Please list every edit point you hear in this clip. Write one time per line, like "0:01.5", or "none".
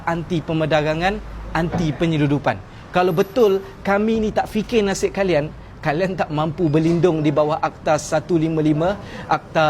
none